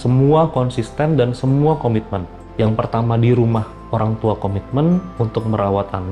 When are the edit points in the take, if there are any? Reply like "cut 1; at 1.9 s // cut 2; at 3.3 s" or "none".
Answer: cut 1; at 2.4 s